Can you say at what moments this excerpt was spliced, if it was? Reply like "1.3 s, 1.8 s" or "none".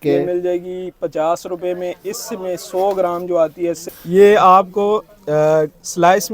3.9 s